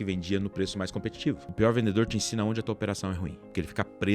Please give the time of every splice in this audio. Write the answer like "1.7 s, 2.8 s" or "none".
1.5 s, 3.2 s